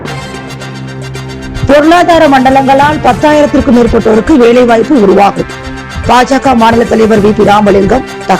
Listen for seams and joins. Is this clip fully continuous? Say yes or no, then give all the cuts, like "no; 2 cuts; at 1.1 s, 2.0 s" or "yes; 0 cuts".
yes; 0 cuts